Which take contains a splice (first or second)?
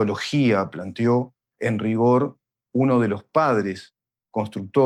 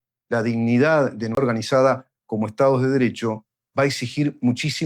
second